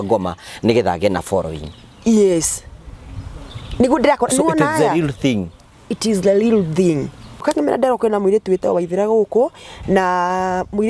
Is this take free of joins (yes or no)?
no